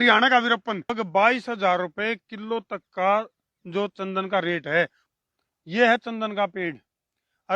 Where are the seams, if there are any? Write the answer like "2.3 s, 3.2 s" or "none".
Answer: 0.9 s, 5.1 s